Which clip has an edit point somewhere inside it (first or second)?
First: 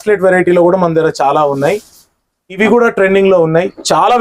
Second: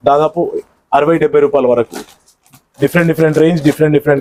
first